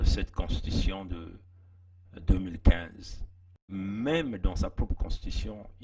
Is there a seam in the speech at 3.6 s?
yes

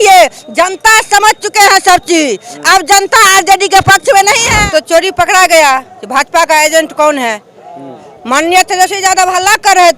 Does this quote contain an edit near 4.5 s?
yes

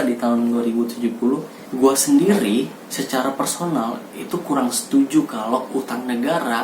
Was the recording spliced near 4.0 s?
no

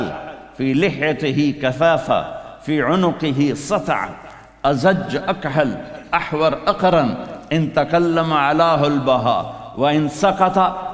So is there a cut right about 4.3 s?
no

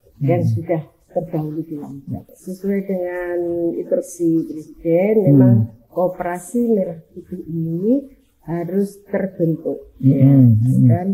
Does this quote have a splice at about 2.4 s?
yes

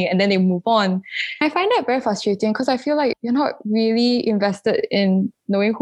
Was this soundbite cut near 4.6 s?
no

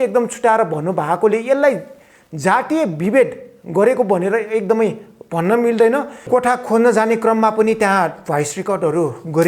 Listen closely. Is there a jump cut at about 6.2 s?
yes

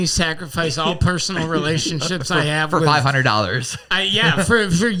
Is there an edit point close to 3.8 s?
no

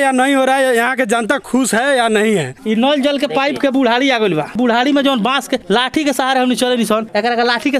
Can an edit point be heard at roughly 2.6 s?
yes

